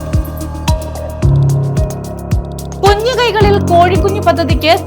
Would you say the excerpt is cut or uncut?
cut